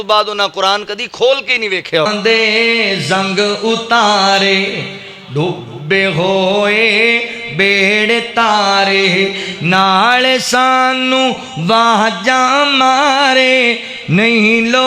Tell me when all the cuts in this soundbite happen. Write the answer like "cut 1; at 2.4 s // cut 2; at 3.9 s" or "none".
cut 1; at 2.1 s